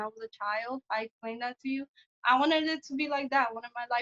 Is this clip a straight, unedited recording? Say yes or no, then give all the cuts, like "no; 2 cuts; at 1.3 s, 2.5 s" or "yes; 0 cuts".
yes; 0 cuts